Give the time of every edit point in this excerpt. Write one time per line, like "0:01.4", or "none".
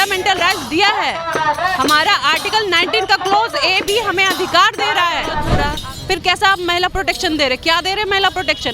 0:05.5